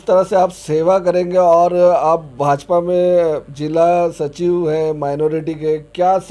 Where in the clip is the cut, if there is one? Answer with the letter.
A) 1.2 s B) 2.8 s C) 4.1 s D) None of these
D